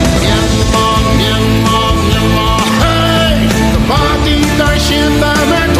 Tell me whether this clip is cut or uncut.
uncut